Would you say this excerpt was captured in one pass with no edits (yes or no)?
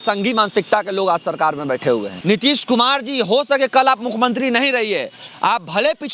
no